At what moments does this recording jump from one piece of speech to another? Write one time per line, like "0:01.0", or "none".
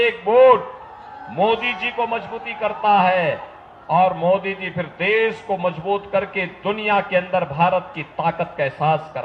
none